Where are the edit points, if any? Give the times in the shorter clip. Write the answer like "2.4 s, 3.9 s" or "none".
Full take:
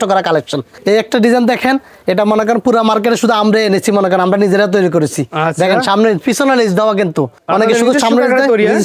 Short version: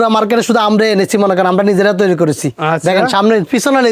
none